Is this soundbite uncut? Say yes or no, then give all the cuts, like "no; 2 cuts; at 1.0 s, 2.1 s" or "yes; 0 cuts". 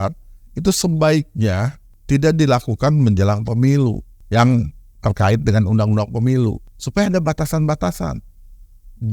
yes; 0 cuts